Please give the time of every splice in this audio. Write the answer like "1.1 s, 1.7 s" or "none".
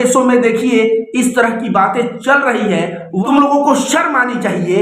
3.2 s